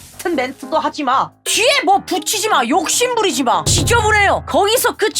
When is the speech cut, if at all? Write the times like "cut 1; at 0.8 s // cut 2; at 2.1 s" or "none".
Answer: none